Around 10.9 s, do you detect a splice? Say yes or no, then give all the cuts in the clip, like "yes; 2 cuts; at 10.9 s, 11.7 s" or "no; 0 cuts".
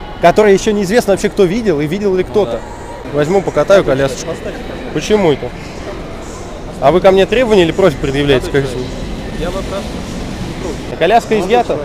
yes; 2 cuts; at 3.0 s, 10.9 s